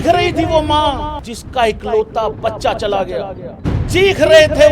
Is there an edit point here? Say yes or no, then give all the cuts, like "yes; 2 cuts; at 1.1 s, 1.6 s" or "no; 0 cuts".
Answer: yes; 2 cuts; at 1.1 s, 3.4 s